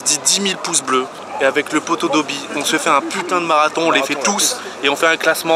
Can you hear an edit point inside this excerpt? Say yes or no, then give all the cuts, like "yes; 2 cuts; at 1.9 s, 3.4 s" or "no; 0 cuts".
no; 0 cuts